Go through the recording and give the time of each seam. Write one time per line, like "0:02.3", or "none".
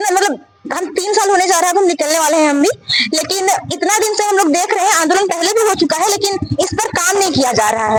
none